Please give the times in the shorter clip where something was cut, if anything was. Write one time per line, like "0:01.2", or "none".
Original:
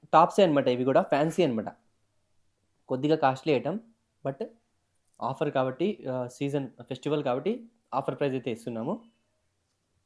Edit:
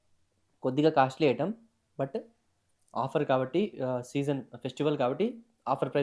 none